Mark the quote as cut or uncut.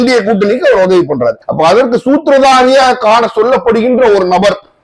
cut